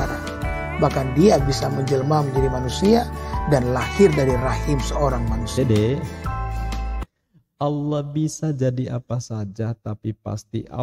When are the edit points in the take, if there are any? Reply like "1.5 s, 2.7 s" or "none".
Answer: none